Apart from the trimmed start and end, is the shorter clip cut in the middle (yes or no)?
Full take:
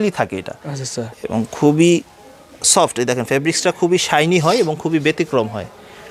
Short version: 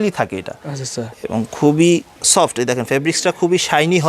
yes